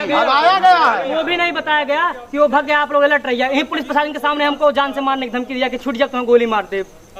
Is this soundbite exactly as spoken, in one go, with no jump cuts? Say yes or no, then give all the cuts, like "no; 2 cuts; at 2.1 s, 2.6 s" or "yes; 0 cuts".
yes; 0 cuts